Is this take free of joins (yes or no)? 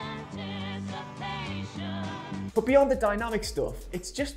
no